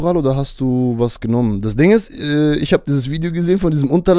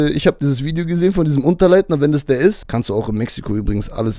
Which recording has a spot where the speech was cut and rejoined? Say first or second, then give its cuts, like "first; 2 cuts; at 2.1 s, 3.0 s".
second; 1 cut; at 2.6 s